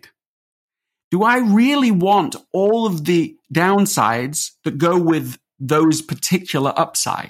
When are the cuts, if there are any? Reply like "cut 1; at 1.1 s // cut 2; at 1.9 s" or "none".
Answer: none